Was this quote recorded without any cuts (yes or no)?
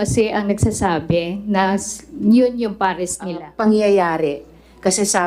no